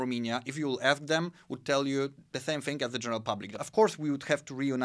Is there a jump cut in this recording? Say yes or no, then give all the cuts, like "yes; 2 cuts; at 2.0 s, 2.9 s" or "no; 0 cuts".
yes; 1 cut; at 3.6 s